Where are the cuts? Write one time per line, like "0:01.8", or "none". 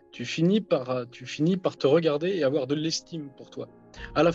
none